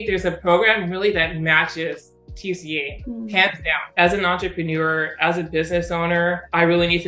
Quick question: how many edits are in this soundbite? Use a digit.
1